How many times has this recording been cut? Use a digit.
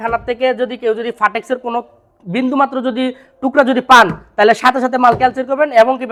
0